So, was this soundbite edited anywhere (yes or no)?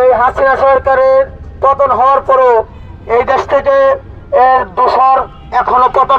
no